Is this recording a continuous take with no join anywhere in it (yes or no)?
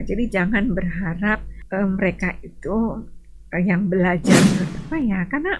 no